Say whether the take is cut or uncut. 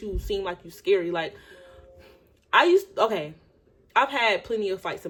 uncut